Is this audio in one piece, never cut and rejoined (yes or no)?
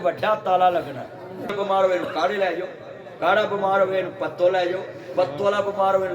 no